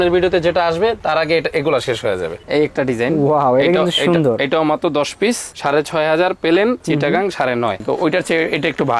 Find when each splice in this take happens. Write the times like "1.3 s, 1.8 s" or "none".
2.4 s, 7.8 s